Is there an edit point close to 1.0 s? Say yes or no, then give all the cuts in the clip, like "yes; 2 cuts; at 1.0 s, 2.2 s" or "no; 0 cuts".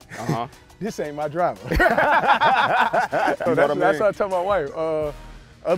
no; 1 cut; at 3.4 s